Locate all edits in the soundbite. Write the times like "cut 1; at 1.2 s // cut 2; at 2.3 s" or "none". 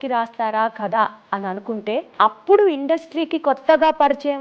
cut 1; at 2.1 s